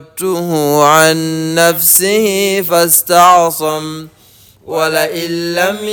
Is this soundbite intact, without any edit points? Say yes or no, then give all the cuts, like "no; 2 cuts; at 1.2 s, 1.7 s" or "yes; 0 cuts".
yes; 0 cuts